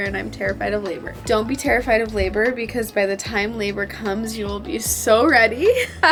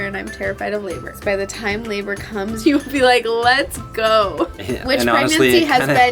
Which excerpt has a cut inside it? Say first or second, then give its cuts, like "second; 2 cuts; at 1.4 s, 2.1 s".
second; 3 cuts; at 1.2 s, 2.6 s, 4.5 s